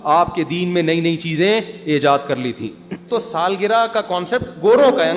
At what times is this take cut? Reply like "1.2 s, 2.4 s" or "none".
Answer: 3.1 s